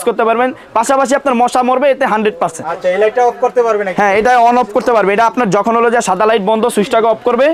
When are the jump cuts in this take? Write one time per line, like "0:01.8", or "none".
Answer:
none